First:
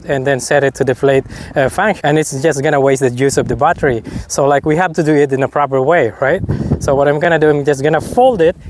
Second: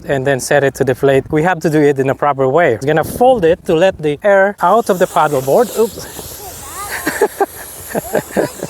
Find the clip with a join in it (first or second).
second